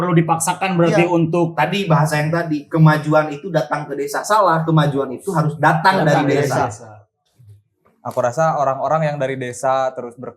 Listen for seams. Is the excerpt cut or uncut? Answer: cut